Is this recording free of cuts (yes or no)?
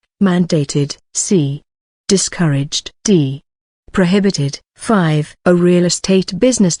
no